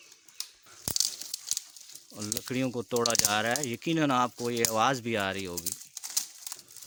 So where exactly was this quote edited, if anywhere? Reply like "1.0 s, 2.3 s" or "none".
none